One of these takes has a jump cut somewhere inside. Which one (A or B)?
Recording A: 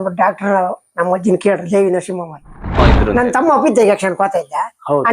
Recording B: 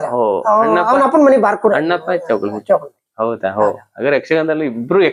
A